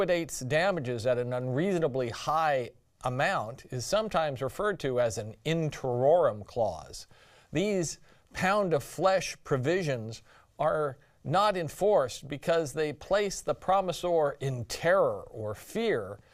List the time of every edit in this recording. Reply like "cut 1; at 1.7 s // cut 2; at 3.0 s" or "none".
none